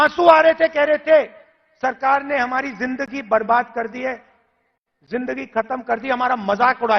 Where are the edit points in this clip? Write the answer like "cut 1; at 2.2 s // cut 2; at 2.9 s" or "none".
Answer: none